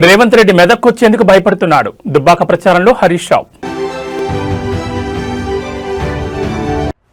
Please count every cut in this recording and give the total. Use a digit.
0